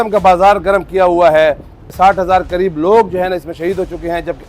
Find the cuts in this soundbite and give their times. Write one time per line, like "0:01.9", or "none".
0:01.9